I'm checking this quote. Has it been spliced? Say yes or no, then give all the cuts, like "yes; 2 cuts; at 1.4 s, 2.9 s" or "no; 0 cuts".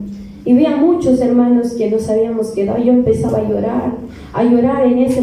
no; 0 cuts